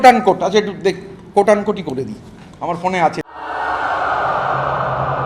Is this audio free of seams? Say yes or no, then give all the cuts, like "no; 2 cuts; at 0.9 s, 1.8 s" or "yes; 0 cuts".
no; 1 cut; at 3.3 s